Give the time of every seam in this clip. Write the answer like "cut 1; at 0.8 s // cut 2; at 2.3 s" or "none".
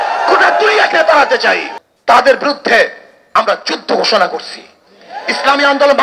cut 1; at 1.8 s